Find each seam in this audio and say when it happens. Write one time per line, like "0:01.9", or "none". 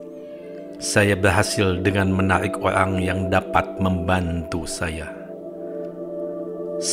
0:00.9